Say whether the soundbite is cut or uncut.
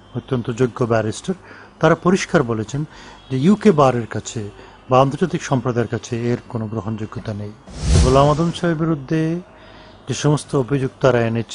cut